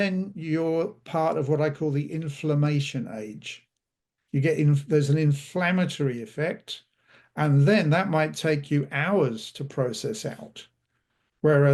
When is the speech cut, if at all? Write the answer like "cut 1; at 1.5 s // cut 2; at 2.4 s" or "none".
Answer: none

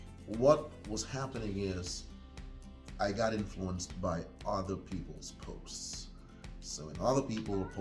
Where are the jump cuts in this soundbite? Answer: none

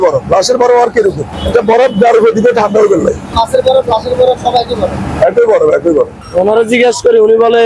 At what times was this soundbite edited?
cut 1; at 1.3 s // cut 2; at 3.3 s // cut 3; at 6.1 s

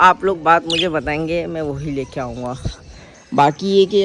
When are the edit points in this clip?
none

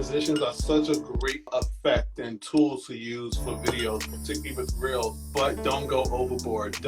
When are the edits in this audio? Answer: cut 1; at 1.5 s // cut 2; at 5.2 s

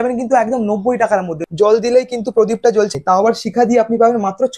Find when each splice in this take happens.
cut 1; at 1.4 s // cut 2; at 2.9 s

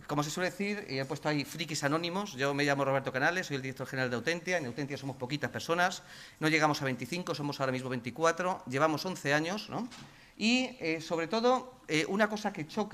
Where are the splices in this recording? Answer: none

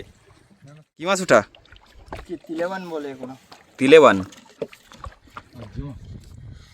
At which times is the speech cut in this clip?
cut 1; at 1.1 s

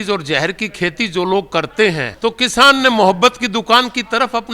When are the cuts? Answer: cut 1; at 2.1 s

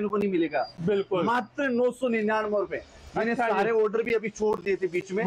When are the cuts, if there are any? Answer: none

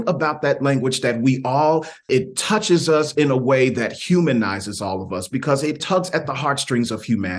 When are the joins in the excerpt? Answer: cut 1; at 2.1 s // cut 2; at 5.8 s

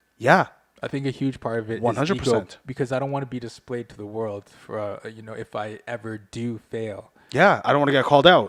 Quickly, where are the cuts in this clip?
none

